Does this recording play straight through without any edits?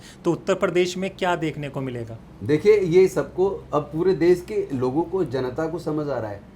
yes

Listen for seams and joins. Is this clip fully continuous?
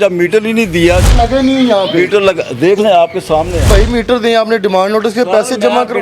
no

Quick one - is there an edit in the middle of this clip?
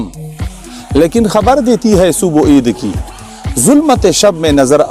no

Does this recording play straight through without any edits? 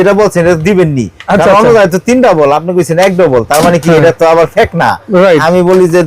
yes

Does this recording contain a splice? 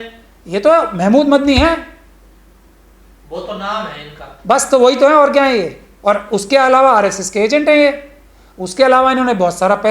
no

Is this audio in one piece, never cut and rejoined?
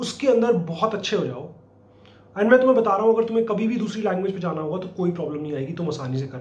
yes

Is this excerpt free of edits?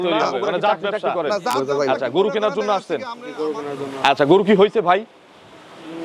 no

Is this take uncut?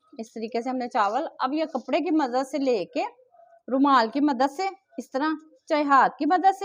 yes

